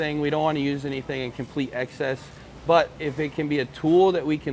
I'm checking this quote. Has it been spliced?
no; 0 cuts

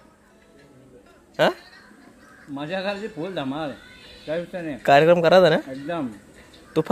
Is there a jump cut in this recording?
no; 0 cuts

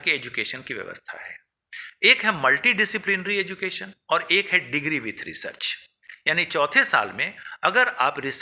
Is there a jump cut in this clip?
no; 0 cuts

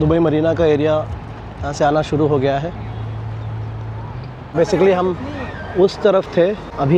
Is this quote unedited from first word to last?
yes; 0 cuts

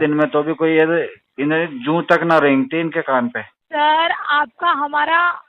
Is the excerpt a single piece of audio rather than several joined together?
no; 1 cut; at 3.5 s

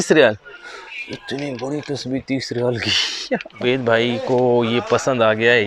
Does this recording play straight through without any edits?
no; 1 cut; at 3.6 s

